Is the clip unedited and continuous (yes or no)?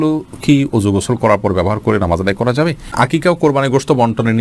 no